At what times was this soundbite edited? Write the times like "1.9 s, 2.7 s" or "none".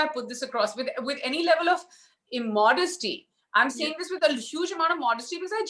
none

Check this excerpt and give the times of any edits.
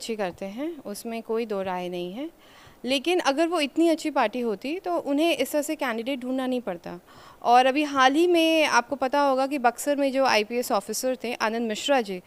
none

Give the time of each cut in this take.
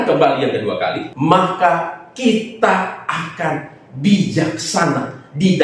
1.1 s

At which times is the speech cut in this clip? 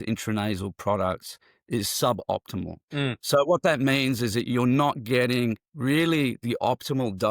3.2 s

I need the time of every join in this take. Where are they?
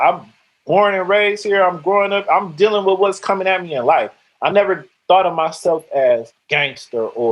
6.4 s

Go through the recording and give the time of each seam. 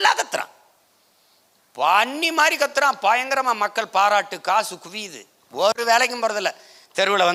none

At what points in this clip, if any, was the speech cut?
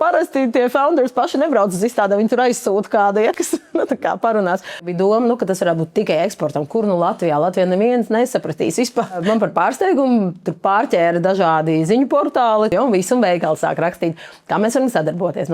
4.9 s, 9.2 s, 12.7 s

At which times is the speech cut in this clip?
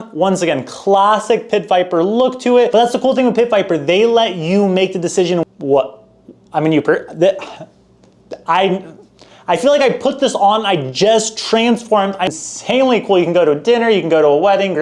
2.7 s, 5.4 s, 12.3 s

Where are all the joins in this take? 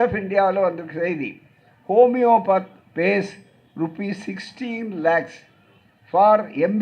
none

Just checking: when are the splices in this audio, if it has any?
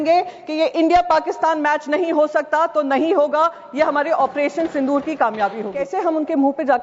5.8 s

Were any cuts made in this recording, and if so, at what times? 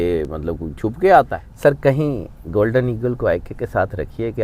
1.4 s

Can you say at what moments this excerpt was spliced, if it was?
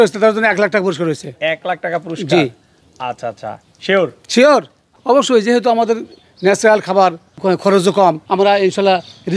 4.9 s, 7.3 s, 8.2 s

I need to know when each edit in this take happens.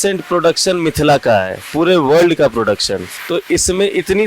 3.1 s

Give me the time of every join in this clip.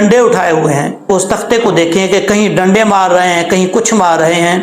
1.0 s

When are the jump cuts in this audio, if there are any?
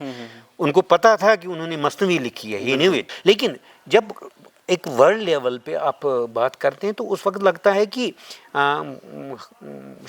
3.1 s

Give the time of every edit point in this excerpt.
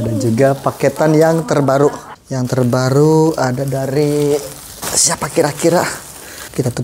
none

